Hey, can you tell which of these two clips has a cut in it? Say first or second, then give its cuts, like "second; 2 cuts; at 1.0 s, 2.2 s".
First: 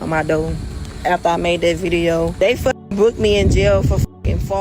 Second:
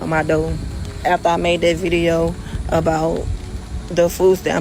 first; 1 cut; at 2.3 s